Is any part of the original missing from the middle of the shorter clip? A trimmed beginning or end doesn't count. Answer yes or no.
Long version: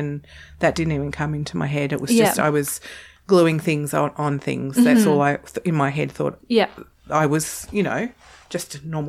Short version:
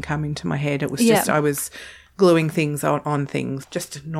yes